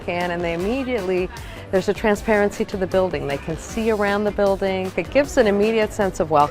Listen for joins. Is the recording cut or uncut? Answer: cut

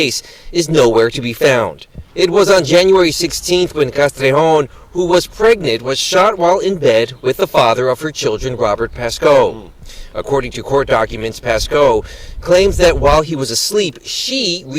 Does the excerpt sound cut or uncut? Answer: cut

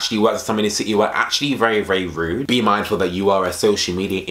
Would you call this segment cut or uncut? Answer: cut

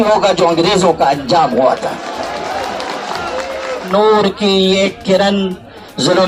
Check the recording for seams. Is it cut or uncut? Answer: cut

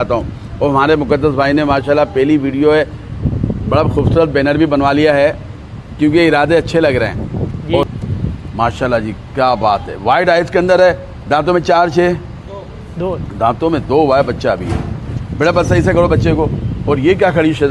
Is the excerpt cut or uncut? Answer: cut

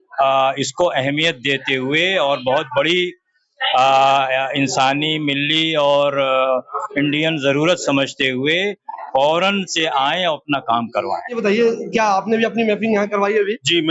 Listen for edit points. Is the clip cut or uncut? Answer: cut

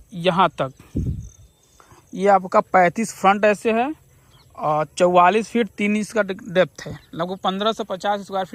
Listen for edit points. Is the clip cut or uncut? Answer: uncut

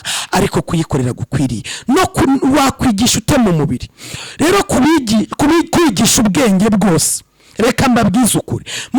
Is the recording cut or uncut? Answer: uncut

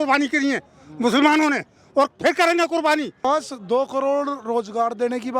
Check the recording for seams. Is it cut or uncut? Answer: cut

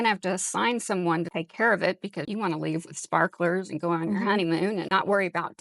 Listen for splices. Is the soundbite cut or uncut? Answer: cut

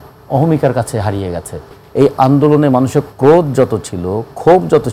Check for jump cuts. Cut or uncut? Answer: cut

